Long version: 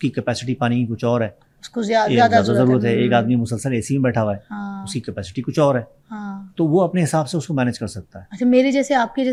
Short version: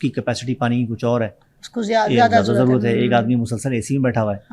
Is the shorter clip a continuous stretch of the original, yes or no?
yes